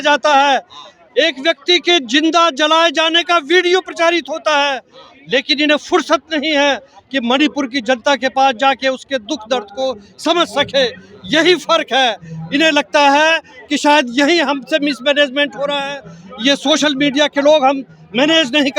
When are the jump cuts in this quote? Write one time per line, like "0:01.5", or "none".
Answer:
none

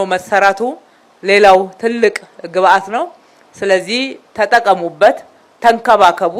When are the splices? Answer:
none

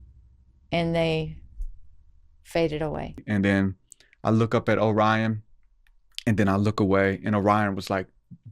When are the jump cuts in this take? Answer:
0:03.2

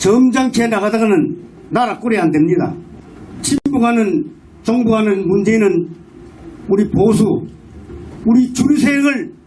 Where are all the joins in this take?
none

